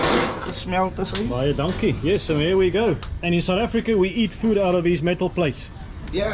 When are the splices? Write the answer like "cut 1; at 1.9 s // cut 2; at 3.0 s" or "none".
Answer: none